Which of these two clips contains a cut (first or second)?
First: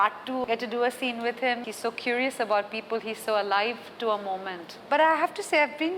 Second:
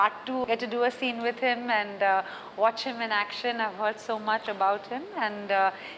first